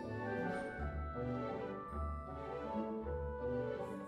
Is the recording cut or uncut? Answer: uncut